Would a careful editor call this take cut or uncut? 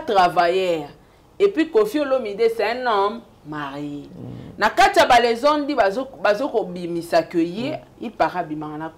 uncut